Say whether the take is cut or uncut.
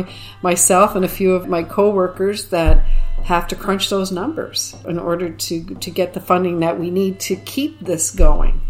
cut